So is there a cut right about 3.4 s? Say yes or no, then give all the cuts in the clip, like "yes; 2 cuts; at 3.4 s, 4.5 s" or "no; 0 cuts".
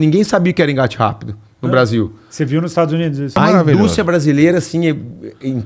yes; 1 cut; at 3.4 s